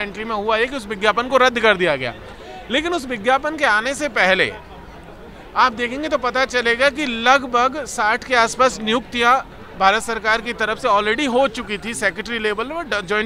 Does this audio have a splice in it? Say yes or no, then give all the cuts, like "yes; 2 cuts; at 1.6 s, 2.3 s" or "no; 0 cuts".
no; 0 cuts